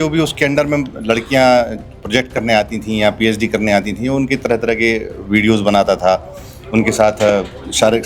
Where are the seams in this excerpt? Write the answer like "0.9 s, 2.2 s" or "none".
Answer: none